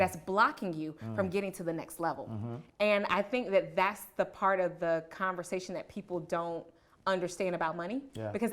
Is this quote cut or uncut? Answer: cut